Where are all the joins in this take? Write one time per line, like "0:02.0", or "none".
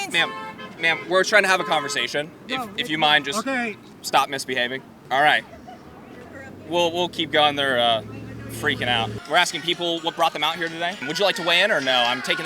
0:02.4
0:03.9
0:05.0
0:09.2